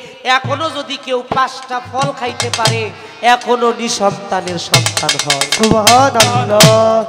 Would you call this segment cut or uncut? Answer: uncut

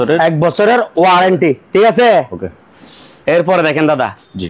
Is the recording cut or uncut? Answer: uncut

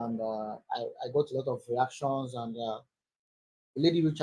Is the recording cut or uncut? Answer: uncut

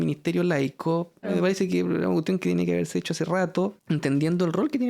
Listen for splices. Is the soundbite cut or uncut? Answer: cut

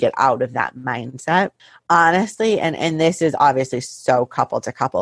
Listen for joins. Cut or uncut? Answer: uncut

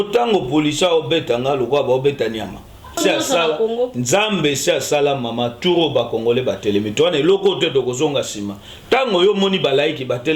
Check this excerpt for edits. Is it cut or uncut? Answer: cut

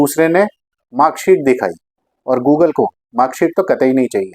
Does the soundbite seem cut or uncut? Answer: uncut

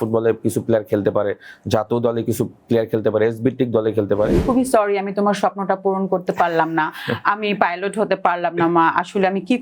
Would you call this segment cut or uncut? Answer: cut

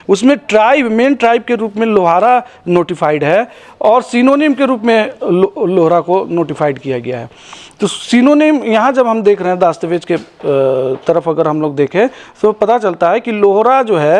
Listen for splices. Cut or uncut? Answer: uncut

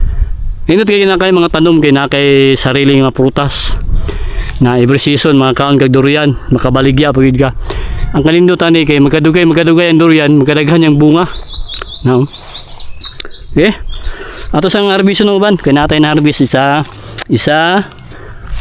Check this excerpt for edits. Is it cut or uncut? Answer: uncut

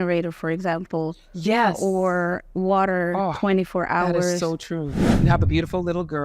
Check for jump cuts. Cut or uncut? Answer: cut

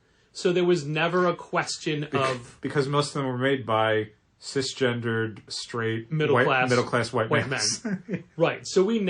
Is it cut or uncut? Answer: cut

